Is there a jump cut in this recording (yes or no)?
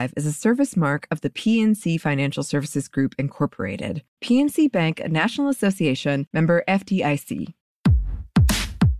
yes